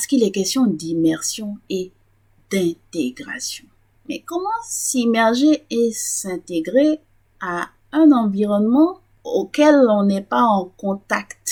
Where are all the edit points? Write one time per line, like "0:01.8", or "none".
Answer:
none